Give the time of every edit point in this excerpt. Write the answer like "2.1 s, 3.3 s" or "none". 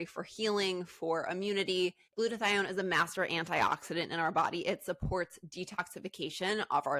2.1 s